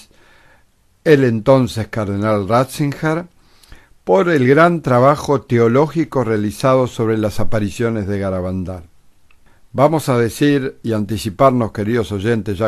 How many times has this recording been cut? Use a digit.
1